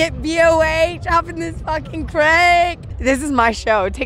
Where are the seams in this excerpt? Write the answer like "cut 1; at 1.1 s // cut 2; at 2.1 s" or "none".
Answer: cut 1; at 2.9 s